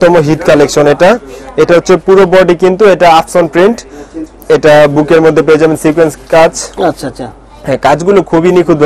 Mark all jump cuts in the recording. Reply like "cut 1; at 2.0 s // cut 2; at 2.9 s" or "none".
none